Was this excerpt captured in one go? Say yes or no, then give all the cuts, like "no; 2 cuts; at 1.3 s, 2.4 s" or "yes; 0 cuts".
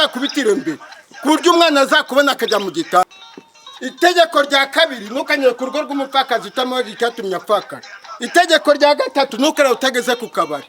no; 1 cut; at 3.0 s